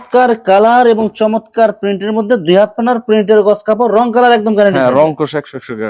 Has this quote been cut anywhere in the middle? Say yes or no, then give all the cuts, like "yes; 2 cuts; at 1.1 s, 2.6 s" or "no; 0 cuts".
no; 0 cuts